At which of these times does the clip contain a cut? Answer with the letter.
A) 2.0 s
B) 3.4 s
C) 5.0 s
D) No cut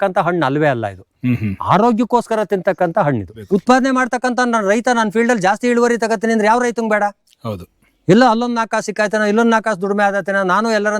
B